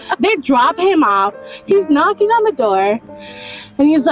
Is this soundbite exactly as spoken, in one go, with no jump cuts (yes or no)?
yes